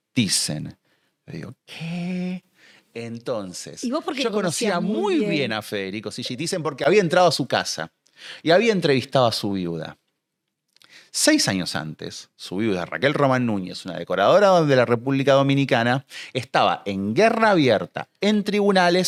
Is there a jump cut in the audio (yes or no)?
no